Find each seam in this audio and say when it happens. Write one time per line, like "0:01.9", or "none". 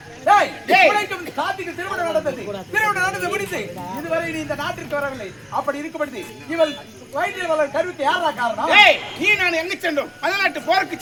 none